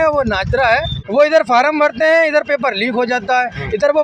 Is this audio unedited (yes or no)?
no